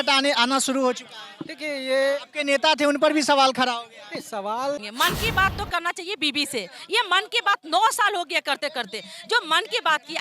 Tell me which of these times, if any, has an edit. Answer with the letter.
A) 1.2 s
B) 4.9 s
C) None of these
B